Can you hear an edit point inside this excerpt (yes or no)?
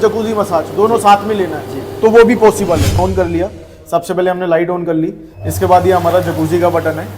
yes